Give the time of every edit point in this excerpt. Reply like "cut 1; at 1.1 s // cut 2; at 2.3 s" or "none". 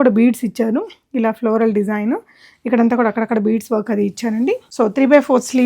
cut 1; at 4.7 s